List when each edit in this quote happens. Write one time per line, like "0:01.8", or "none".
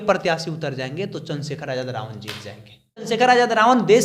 0:03.0